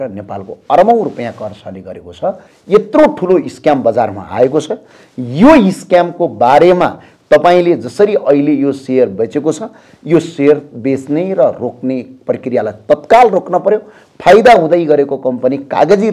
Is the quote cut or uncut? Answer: cut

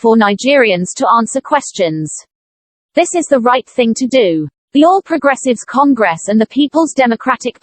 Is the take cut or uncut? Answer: cut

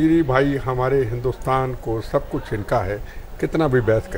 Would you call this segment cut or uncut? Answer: uncut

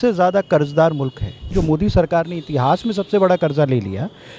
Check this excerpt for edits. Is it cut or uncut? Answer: cut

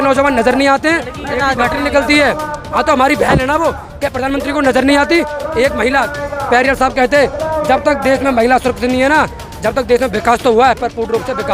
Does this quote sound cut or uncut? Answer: uncut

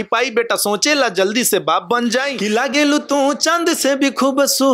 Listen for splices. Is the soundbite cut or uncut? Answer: cut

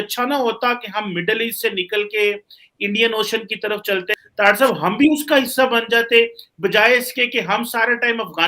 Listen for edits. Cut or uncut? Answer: cut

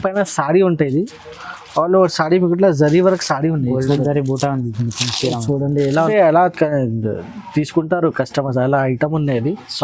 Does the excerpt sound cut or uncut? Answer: cut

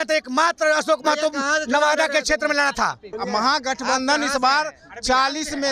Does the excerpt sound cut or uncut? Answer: cut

